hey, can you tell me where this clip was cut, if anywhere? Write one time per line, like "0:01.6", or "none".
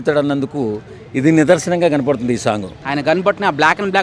0:02.7